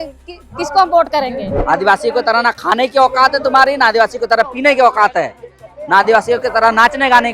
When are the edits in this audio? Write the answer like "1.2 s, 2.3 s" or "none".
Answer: 1.6 s